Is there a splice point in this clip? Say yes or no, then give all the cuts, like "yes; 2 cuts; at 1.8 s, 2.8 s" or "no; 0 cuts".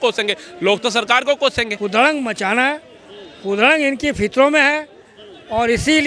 yes; 1 cut; at 1.7 s